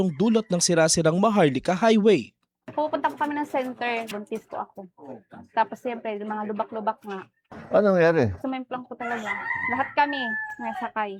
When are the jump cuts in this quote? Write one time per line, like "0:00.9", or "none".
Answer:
none